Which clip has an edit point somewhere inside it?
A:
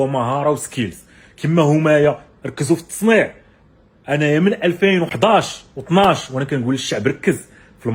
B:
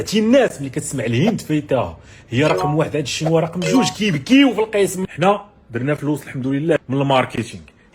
B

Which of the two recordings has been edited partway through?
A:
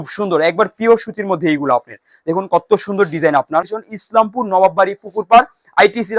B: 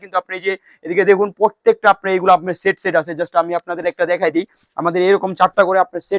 A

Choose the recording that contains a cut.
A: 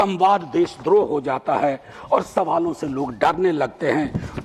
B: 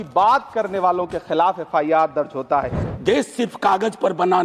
B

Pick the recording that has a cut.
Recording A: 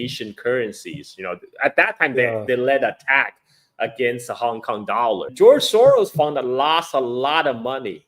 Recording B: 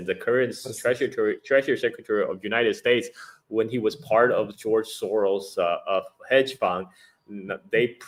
A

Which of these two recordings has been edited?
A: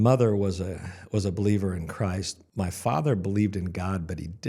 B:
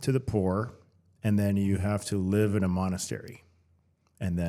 A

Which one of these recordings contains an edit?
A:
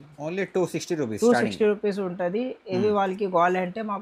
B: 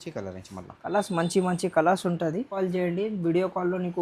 B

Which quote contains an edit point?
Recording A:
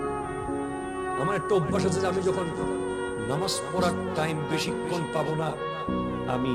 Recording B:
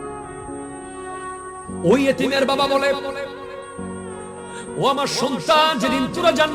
B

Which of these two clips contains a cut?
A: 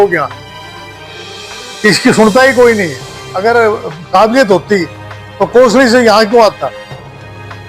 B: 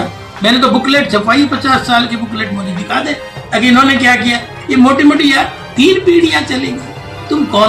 A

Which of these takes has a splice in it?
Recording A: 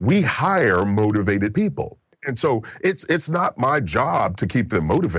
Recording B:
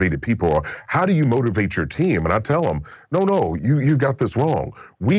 A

